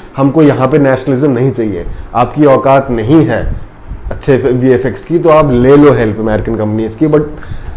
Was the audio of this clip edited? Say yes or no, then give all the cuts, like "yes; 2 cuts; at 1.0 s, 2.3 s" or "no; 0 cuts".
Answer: no; 0 cuts